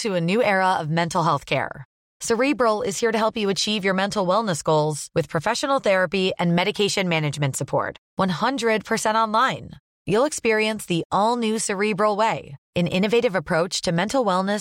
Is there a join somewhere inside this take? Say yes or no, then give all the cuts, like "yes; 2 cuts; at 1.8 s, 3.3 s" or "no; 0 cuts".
no; 0 cuts